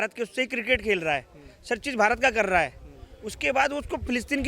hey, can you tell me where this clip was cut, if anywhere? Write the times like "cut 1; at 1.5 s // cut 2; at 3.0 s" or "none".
none